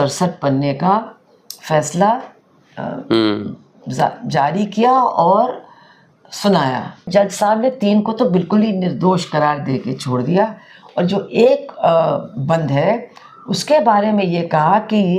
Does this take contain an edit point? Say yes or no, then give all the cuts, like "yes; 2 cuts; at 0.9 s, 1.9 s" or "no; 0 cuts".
yes; 1 cut; at 7.1 s